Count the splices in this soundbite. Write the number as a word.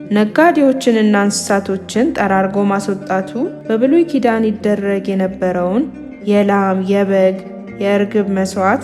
one